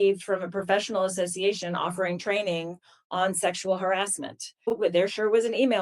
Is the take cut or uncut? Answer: cut